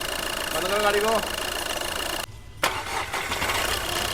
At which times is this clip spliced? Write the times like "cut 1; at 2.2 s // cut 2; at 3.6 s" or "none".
cut 1; at 2.2 s